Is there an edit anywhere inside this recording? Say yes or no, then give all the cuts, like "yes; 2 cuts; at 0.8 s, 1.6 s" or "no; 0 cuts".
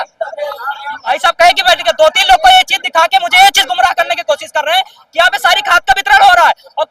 yes; 1 cut; at 1.2 s